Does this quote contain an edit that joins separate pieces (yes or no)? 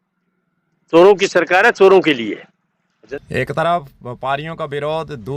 no